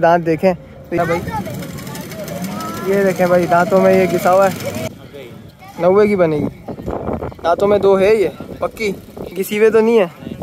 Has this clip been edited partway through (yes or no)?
yes